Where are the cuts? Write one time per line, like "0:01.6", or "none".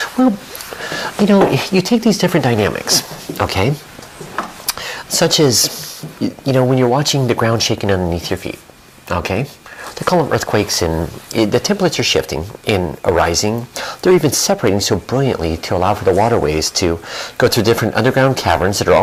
none